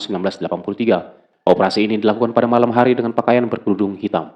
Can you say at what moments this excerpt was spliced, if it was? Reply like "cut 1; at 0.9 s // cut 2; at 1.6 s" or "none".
cut 1; at 1.2 s

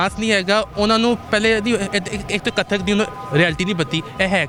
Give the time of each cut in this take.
none

